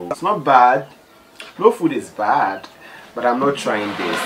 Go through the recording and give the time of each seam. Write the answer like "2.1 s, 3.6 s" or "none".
none